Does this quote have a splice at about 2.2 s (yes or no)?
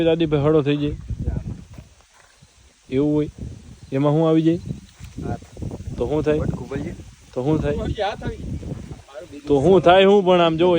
no